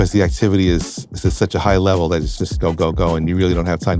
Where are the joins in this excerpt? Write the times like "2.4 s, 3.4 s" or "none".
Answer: none